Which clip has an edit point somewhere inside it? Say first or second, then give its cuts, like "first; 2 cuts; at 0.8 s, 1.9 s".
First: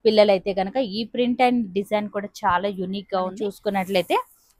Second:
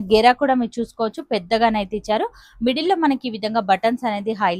first; 1 cut; at 3.5 s